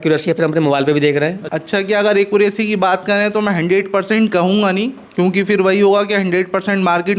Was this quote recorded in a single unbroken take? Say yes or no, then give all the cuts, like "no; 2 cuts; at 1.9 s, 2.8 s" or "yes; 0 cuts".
no; 1 cut; at 1.5 s